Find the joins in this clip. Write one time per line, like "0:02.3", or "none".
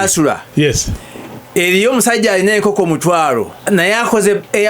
0:03.6